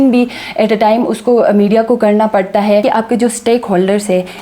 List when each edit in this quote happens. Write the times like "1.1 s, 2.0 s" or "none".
2.8 s